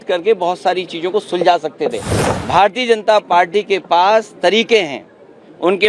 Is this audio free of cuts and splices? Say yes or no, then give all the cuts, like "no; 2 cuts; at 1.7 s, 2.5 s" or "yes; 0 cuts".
no; 1 cut; at 2.1 s